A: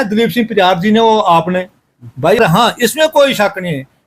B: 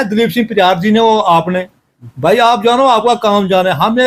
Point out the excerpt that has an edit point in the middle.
A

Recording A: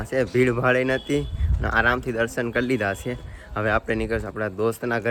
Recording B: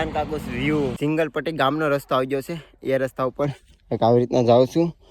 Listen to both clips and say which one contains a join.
B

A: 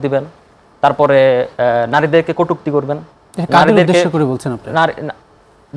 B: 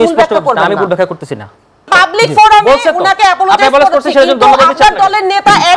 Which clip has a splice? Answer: B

